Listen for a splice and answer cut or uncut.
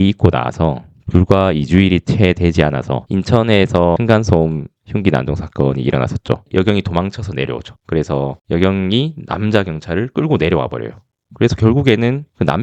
cut